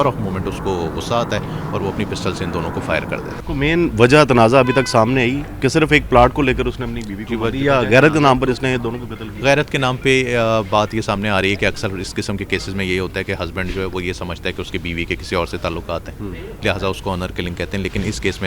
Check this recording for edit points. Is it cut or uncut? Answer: cut